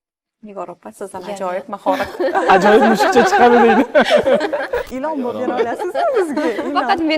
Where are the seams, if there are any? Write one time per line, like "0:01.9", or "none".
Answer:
0:04.9